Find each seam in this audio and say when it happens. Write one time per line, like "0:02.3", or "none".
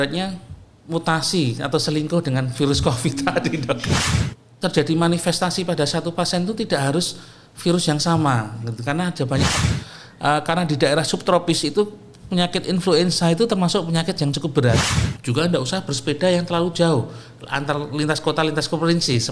0:04.1
0:09.6
0:14.9